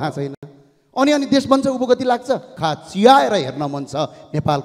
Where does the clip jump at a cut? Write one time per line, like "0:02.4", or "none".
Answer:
0:02.5